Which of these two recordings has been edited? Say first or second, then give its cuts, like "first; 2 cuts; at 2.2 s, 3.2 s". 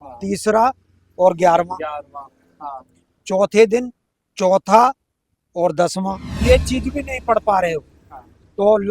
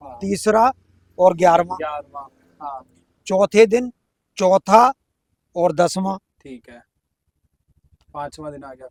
first; 1 cut; at 6.3 s